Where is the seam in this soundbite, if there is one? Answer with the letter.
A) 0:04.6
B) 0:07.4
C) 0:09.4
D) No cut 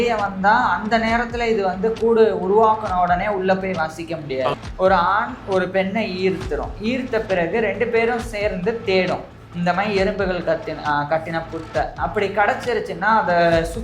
A